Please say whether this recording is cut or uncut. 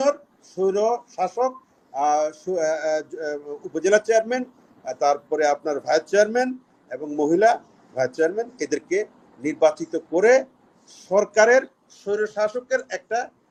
uncut